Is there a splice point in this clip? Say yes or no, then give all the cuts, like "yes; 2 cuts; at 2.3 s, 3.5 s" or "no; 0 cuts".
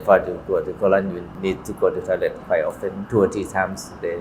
yes; 2 cuts; at 1.3 s, 3.0 s